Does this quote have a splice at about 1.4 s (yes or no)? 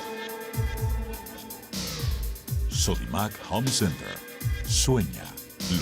yes